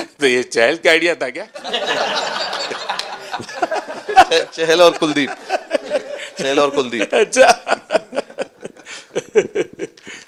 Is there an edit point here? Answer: no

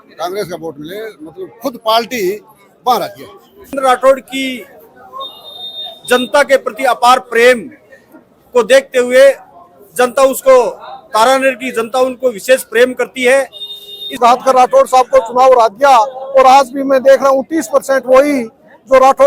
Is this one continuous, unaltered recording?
no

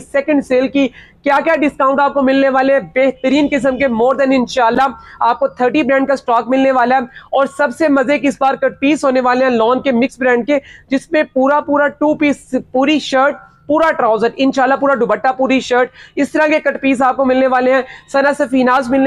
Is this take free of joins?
yes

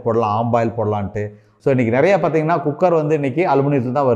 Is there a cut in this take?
yes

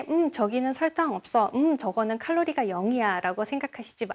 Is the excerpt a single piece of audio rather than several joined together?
yes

